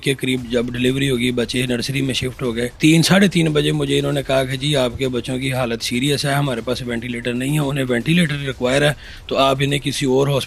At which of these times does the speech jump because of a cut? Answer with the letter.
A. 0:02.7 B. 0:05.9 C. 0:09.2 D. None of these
A